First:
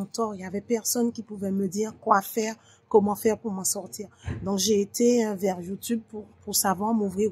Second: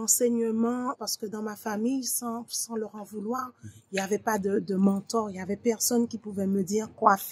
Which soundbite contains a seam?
second; 1 cut; at 1.0 s

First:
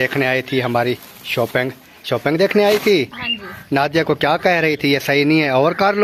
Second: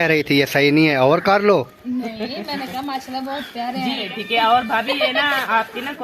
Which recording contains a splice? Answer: second; 1 cut; at 4.1 s

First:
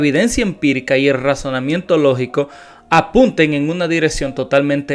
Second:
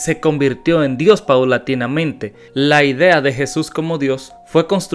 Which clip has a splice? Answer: second; 1 cut; at 2.4 s

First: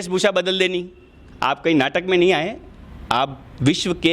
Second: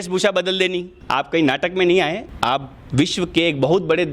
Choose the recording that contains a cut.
second; 2 cuts; at 0.9 s, 2.3 s

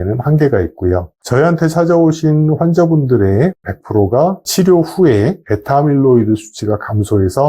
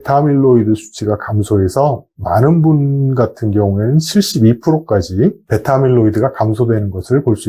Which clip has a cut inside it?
first; 1 cut; at 1.1 s

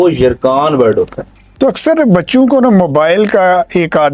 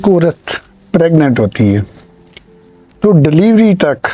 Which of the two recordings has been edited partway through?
first; 1 cut; at 1.4 s

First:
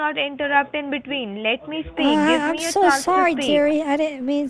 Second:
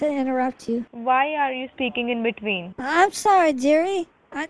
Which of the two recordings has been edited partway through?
second; 2 cuts; at 0.9 s, 2.7 s

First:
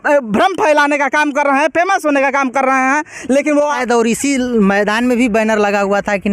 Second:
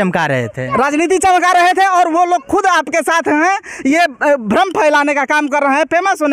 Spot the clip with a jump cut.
first; 1 cut; at 3.8 s

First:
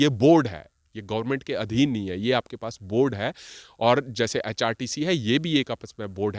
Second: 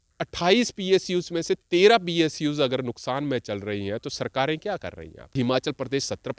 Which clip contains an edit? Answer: second; 1 cut; at 5.3 s

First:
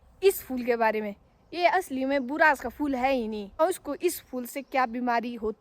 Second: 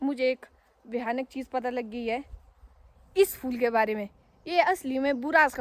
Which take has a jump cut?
first; 1 cut; at 3.6 s

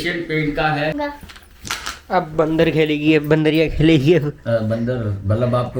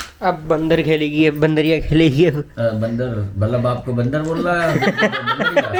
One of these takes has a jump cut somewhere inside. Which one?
first; 1 cut; at 0.9 s

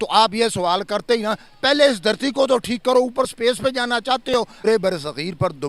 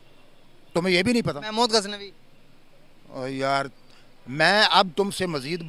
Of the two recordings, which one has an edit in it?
first; 1 cut; at 4.6 s

